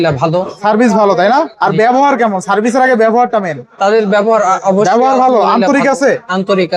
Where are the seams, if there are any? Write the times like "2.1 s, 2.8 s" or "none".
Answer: none